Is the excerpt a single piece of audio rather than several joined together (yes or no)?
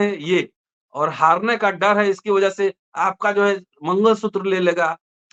yes